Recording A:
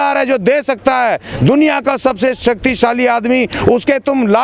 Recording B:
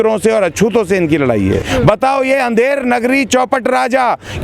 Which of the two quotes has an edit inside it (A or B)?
B